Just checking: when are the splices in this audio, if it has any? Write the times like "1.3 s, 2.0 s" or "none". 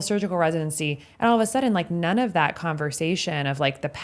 none